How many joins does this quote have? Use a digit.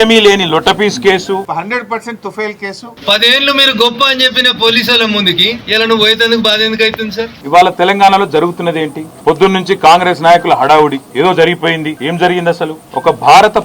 3